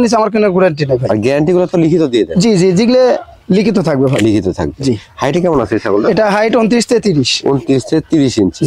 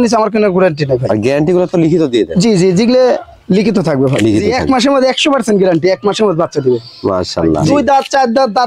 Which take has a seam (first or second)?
second